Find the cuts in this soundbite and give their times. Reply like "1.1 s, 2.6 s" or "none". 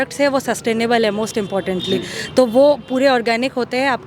none